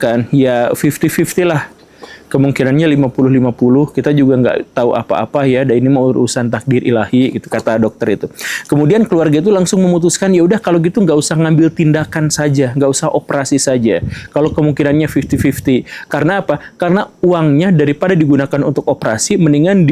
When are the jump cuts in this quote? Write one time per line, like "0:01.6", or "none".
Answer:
none

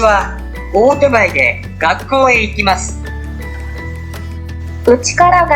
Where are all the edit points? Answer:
0:02.8
0:04.3

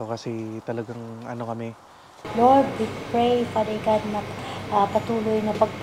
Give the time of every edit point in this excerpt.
0:02.3

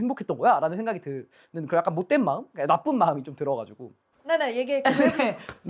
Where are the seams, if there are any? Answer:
none

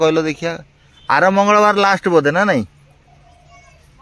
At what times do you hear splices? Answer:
none

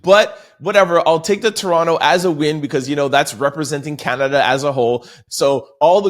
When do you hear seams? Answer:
0:05.2

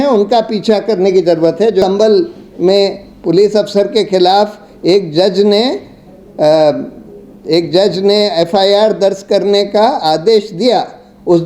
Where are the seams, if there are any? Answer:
0:01.8

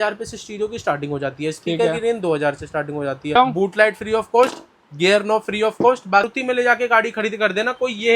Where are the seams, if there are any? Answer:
0:03.4
0:06.3

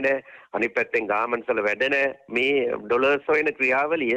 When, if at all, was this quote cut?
none

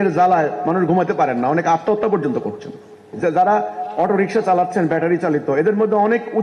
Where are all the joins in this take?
0:03.0

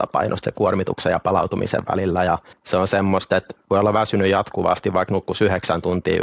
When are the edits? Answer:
0:02.5
0:03.5

